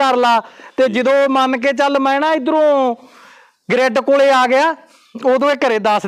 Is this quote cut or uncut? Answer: uncut